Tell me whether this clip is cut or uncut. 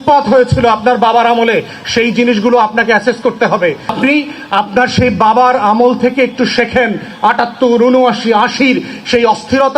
cut